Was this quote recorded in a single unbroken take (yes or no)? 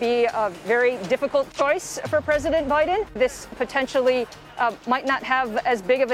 no